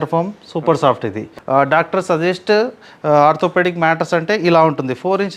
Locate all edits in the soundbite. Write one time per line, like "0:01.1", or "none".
0:01.3